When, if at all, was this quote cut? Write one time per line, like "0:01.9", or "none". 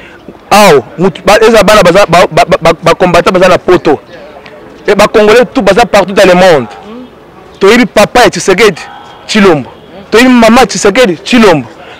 none